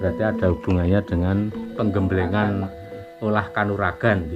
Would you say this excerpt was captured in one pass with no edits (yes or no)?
no